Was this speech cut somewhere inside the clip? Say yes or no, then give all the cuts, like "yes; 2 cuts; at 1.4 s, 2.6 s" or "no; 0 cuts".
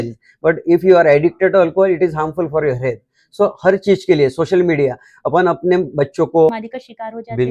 yes; 1 cut; at 6.5 s